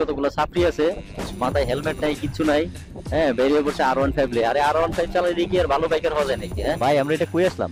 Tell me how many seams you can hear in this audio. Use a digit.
1